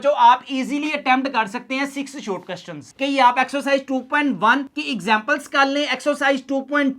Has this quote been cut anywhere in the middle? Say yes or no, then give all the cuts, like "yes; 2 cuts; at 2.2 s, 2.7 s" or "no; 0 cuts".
yes; 1 cut; at 2.9 s